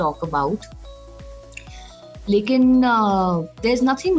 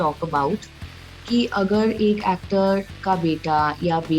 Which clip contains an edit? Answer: second; 1 cut; at 1.2 s

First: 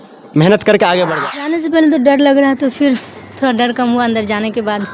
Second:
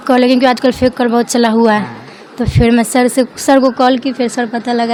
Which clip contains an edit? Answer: first; 1 cut; at 1.1 s

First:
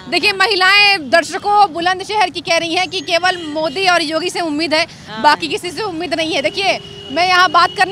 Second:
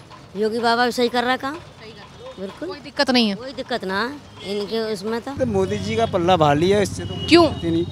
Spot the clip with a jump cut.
second; 1 cut; at 5.3 s

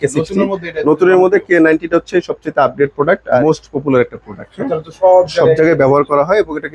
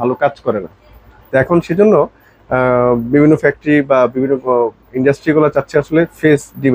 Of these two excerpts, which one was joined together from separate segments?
first; 1 cut; at 3.4 s

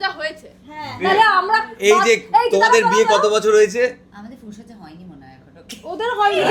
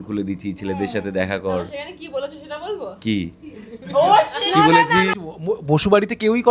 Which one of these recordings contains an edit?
second; 1 cut; at 5.1 s

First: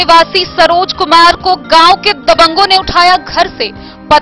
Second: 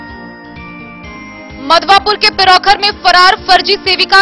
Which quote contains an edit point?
second; 1 cut; at 1.4 s

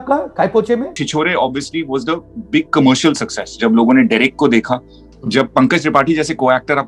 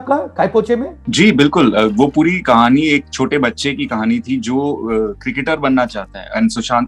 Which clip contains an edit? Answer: first; 2 cuts; at 1.0 s, 5.1 s

